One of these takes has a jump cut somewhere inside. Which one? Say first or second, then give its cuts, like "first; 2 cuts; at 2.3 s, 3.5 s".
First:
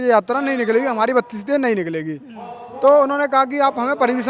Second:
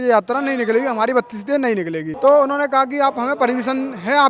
second; 1 cut; at 2.1 s